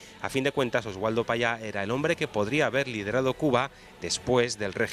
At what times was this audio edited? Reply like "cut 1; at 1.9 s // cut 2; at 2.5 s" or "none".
none